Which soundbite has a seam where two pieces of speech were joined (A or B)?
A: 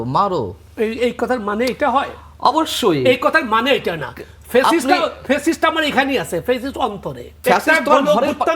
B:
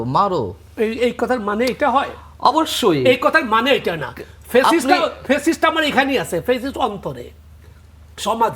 A